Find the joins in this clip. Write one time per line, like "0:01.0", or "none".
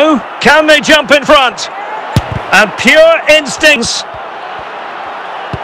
0:03.8